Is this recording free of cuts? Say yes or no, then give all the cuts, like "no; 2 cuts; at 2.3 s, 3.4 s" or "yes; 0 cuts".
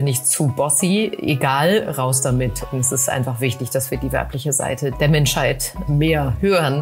no; 3 cuts; at 2.7 s, 4.9 s, 5.8 s